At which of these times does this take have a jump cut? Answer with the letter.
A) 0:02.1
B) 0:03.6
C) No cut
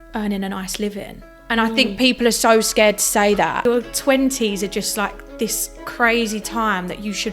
B